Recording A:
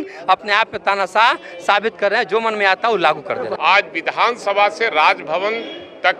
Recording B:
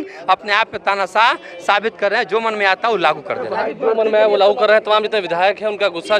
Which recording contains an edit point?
A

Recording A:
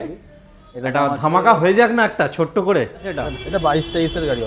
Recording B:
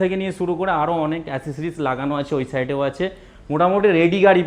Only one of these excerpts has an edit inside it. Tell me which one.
A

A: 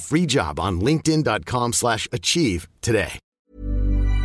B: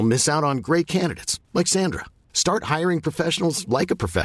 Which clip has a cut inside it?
A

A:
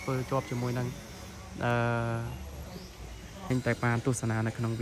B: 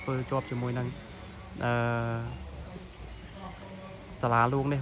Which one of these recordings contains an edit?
A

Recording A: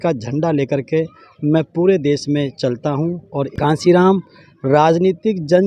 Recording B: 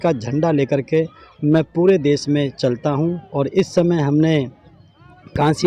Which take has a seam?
A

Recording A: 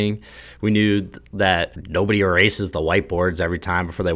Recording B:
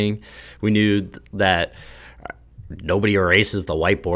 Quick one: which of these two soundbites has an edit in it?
A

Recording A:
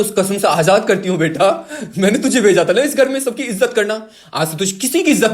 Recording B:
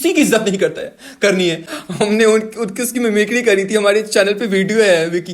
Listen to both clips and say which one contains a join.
B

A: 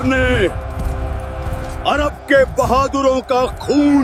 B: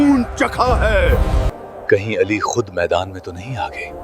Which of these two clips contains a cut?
B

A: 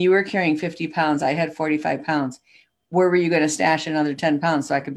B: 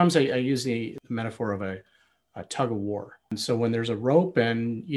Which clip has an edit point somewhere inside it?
B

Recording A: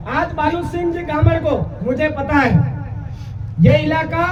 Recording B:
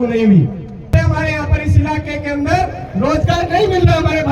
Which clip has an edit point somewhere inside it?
B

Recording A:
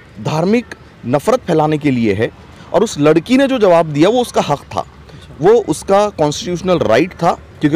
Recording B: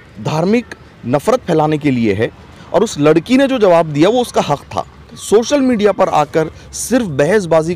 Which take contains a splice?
B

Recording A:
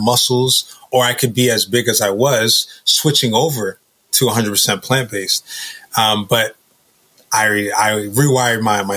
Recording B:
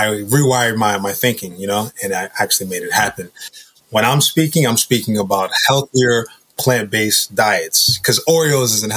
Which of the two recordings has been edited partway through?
B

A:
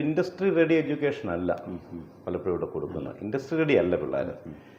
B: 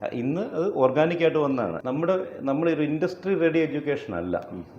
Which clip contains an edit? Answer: B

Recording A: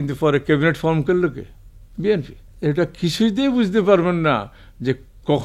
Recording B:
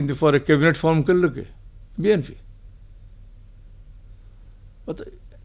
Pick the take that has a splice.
A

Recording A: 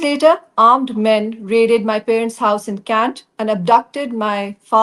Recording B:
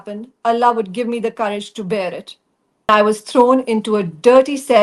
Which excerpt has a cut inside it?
B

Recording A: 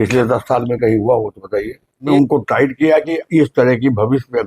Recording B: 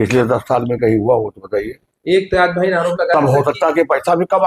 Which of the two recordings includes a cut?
A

